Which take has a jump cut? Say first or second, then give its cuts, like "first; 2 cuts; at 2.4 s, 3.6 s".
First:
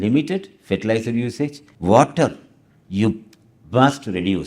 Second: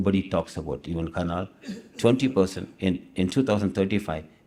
first; 1 cut; at 1.7 s